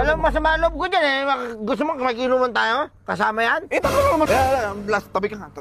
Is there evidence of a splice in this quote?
yes; 1 cut; at 4.3 s

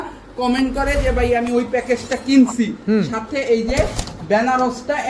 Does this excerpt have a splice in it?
no; 0 cuts

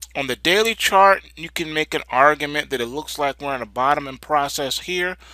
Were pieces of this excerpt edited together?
yes; 1 cut; at 4.2 s

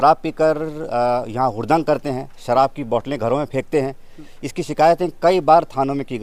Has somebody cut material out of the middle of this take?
no; 0 cuts

